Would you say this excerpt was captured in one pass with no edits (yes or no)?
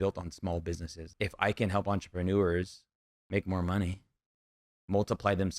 no